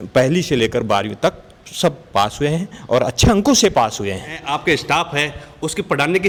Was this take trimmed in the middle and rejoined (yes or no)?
no